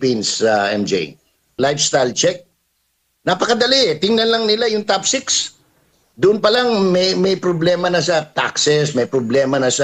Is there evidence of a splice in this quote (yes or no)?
yes